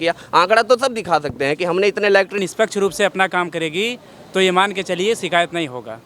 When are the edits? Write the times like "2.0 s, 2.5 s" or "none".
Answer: 2.4 s